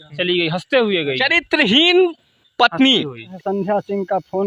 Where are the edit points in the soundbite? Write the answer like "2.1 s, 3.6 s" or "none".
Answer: 3.3 s